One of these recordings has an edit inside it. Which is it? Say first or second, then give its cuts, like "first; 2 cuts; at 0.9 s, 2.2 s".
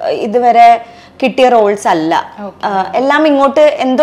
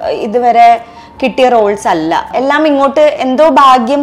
second; 1 cut; at 2.3 s